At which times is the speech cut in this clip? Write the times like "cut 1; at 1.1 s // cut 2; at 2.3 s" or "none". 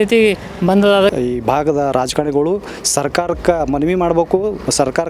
cut 1; at 1.1 s